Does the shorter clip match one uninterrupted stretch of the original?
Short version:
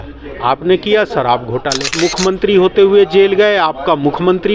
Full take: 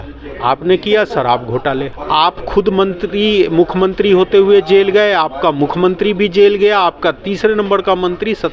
no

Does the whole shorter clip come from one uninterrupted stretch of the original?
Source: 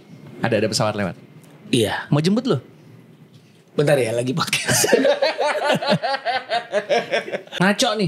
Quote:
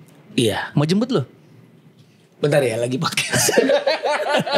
yes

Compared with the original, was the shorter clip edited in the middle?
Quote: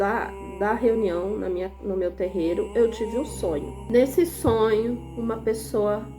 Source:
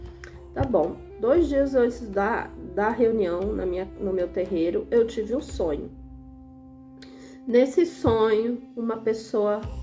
yes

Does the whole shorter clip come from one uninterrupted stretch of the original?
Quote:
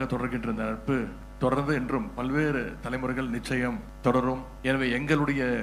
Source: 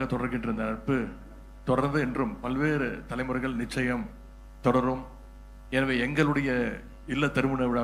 no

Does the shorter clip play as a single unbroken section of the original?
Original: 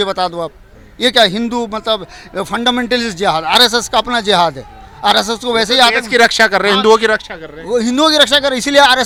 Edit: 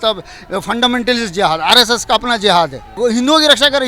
no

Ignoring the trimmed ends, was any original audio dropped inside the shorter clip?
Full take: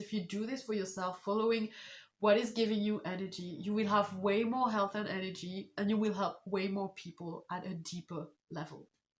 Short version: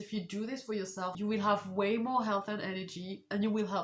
yes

